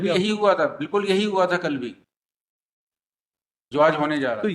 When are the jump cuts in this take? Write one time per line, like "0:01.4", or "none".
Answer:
none